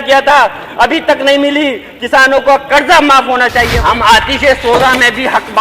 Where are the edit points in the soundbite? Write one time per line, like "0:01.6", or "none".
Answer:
0:03.7